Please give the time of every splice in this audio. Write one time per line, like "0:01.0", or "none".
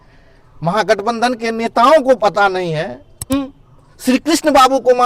0:03.3